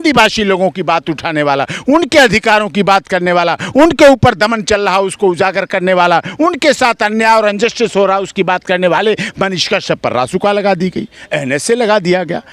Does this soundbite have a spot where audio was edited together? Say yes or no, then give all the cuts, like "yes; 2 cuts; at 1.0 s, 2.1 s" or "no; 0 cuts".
no; 0 cuts